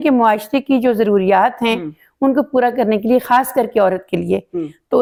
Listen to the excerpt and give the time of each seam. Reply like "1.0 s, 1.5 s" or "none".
none